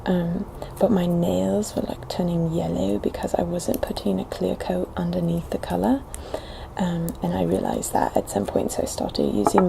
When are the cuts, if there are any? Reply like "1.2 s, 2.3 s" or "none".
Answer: 6.6 s